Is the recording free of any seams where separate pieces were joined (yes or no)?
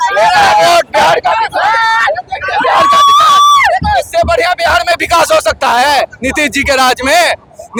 yes